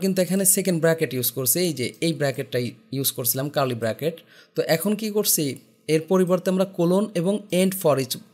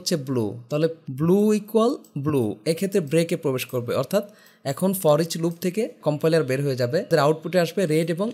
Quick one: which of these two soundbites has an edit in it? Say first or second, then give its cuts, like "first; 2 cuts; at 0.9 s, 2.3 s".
second; 3 cuts; at 1.0 s, 6.0 s, 7.1 s